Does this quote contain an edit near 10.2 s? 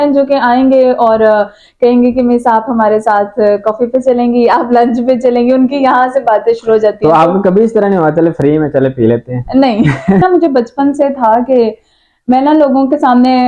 yes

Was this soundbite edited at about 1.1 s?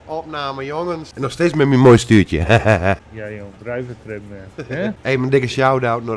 yes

